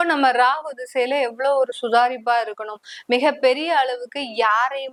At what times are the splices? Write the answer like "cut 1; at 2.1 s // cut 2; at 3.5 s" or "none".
none